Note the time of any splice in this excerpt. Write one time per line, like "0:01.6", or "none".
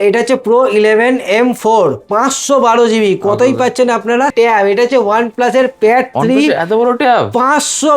0:04.3

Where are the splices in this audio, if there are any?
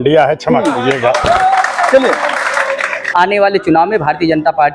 0:03.1

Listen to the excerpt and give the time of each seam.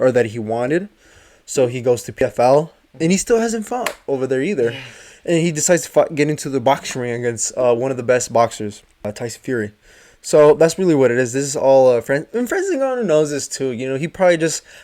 0:02.2
0:09.0

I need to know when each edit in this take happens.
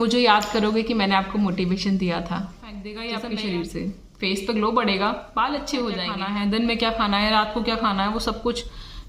0:02.9
0:06.1

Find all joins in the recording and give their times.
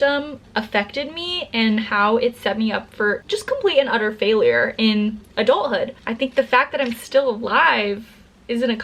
0:06.0

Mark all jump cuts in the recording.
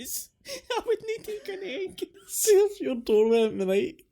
0:02.3

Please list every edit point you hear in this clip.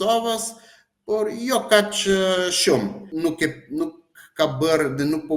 0:03.0

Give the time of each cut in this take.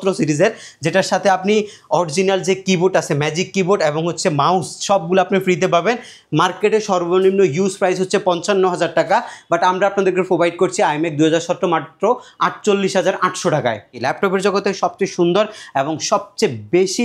0:14.0

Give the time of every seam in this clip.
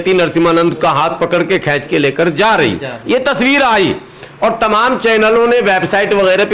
none

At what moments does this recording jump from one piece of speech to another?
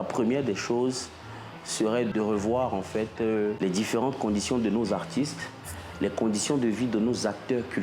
0:02.1
0:03.6

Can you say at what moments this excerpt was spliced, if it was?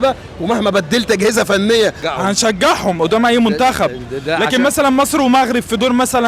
0:02.0

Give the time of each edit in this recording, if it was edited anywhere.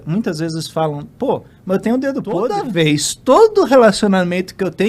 0:02.6

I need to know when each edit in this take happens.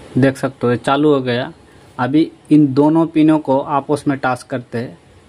none

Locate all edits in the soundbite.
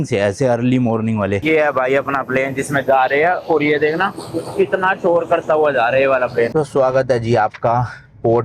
0:01.4
0:06.5

